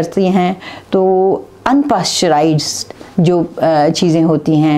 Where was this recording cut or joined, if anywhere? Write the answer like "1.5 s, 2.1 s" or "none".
none